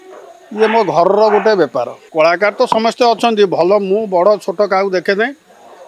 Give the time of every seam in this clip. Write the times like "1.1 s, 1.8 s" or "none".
2.0 s